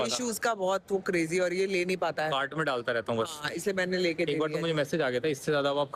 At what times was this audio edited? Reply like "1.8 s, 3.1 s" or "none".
none